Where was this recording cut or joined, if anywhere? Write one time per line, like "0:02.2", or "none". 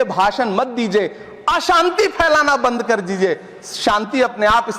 none